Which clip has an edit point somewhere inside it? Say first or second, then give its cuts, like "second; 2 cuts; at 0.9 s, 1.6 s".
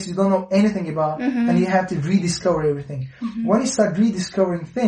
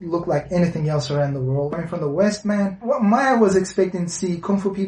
second; 2 cuts; at 1.7 s, 2.8 s